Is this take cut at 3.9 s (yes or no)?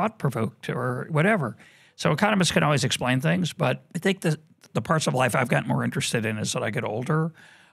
yes